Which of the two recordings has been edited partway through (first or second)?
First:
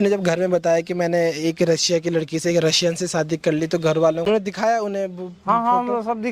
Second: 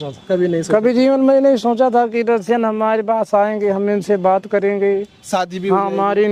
first